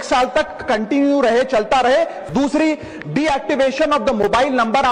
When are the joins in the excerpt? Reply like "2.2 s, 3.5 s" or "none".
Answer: 2.2 s

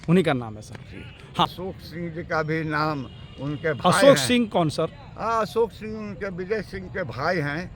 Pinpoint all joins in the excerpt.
1.5 s

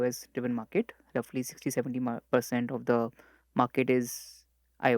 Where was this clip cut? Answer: none

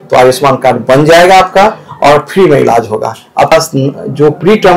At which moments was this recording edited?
3.5 s

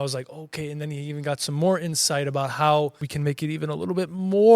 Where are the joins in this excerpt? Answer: 3.1 s

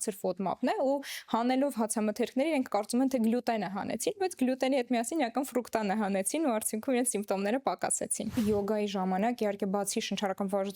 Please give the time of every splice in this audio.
8.3 s

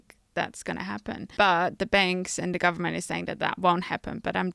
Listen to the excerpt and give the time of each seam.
1.3 s

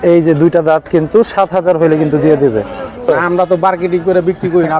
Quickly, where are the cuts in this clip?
3.0 s

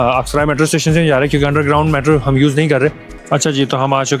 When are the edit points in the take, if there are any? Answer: 3.1 s

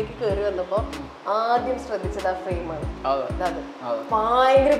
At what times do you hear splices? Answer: none

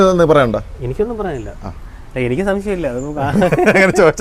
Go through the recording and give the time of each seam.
none

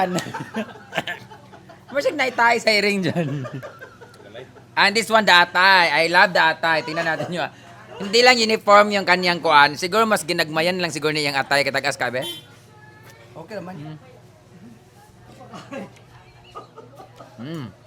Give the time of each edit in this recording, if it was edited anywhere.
none

